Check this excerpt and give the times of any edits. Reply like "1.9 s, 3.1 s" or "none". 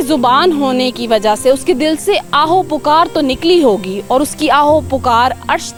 none

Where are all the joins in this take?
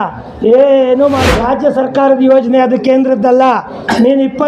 1.3 s

